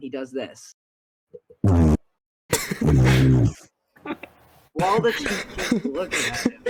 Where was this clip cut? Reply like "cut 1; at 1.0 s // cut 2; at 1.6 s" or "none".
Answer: none